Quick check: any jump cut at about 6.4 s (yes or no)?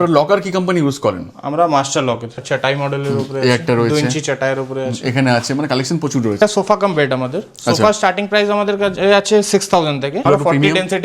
yes